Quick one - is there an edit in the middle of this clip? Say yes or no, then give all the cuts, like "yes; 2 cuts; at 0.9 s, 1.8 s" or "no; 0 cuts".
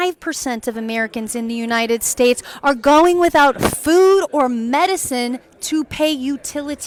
no; 0 cuts